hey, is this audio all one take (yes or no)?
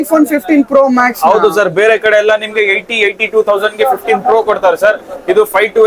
yes